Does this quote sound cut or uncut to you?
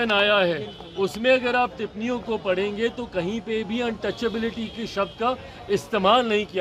uncut